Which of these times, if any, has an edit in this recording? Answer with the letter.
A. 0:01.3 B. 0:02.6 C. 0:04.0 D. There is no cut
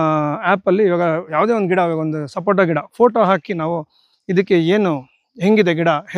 A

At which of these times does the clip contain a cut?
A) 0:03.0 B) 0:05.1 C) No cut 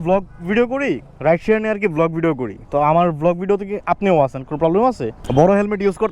B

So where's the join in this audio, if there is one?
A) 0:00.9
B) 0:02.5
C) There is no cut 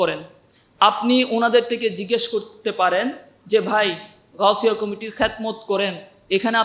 C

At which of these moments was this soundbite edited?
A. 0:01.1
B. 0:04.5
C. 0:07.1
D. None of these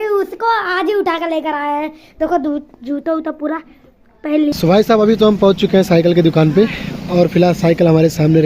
B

